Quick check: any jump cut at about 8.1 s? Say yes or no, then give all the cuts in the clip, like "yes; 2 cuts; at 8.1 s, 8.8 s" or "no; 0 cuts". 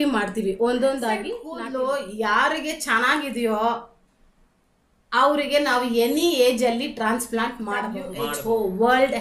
yes; 2 cuts; at 1.4 s, 8.1 s